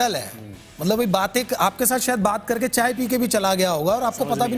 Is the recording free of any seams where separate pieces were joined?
yes; 0 cuts

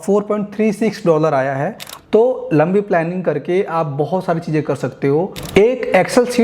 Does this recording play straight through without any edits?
no; 1 cut; at 1.9 s

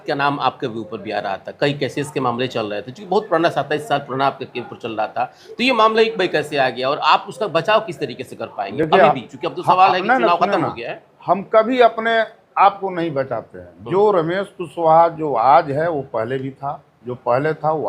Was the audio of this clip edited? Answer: no; 0 cuts

